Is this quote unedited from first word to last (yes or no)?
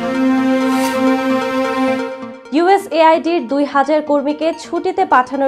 no